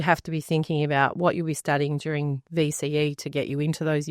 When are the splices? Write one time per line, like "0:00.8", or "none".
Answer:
none